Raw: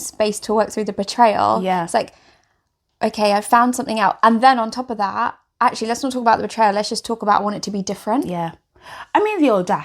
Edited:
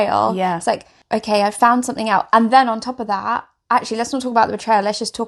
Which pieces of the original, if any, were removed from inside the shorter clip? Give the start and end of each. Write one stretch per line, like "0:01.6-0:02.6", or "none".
0:02.2-0:02.8